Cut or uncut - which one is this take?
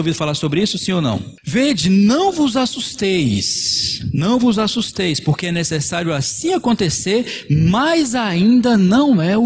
cut